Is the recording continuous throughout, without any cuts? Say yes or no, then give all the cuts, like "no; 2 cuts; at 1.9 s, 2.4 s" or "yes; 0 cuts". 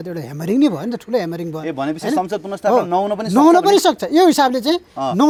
yes; 0 cuts